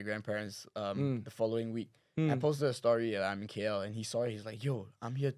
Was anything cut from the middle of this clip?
no; 0 cuts

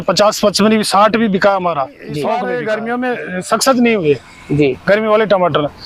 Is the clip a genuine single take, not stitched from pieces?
no; 1 cut; at 2.3 s

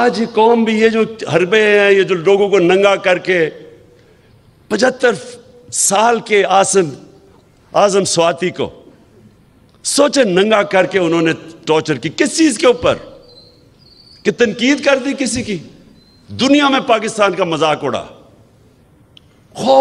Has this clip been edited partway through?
no; 0 cuts

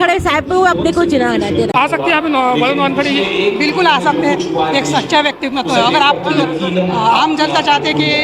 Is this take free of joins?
no; 1 cut; at 1.7 s

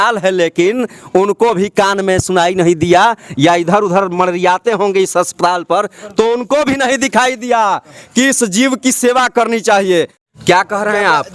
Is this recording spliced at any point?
yes; 1 cut; at 10.2 s

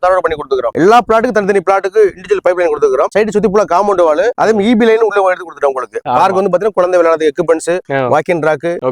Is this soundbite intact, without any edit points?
no; 2 cuts; at 0.7 s, 6.0 s

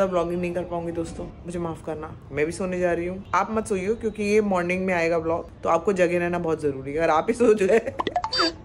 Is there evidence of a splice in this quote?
yes; 1 cut; at 2.2 s

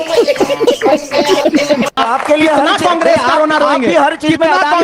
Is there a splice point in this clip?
yes; 1 cut; at 2.0 s

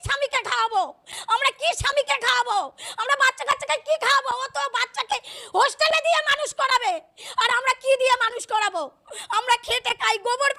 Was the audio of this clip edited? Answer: no; 0 cuts

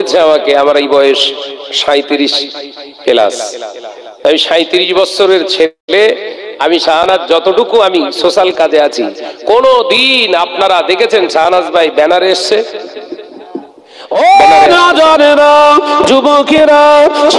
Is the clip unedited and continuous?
no; 1 cut; at 14.1 s

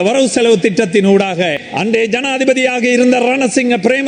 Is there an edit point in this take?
yes; 1 cut; at 1.7 s

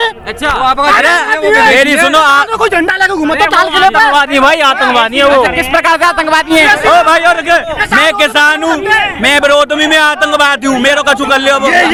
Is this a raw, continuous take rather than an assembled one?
yes; 0 cuts

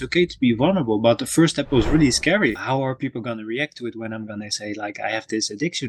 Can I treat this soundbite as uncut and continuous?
no; 1 cut; at 2.6 s

